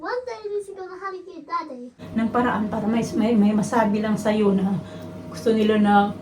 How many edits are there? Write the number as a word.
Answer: one